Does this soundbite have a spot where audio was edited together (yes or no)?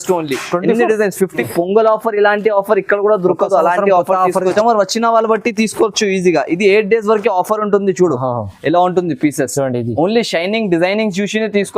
yes